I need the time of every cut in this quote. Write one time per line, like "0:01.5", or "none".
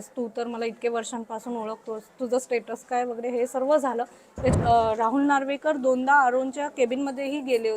0:04.5

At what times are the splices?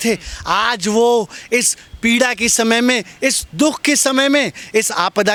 none

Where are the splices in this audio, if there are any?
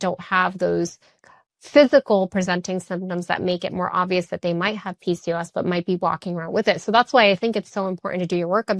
none

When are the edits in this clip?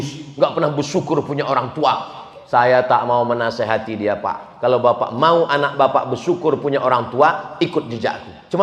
none

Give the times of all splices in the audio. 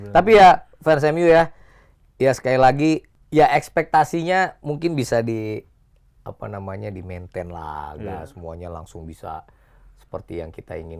0:03.1

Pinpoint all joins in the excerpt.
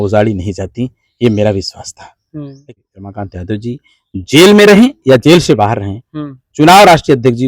0:02.7

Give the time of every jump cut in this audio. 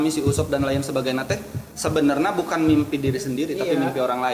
none

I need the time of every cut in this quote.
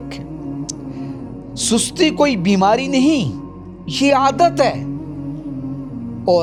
none

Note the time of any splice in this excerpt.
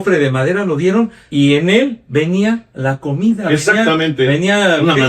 0:01.2
0:02.7

